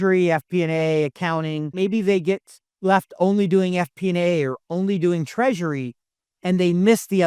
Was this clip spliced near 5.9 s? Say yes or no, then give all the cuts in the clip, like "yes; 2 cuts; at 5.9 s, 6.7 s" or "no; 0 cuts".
no; 1 cut; at 1.7 s